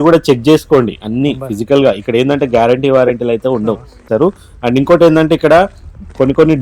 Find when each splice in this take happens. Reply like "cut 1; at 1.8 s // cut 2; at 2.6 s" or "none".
cut 1; at 4.1 s